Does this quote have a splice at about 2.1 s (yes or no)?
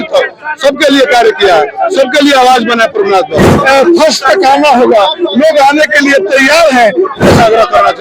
no